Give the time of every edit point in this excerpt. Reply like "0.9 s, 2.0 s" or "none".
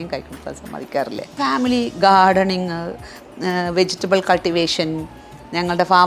1.4 s